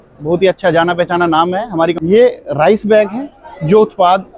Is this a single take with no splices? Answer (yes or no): no